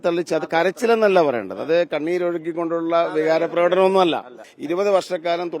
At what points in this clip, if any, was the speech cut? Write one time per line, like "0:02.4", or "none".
0:04.5